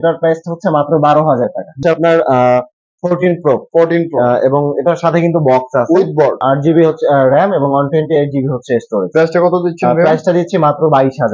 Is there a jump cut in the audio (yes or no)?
yes